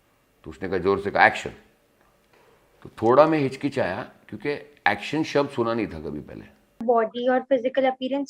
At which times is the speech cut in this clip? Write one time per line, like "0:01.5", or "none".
0:06.8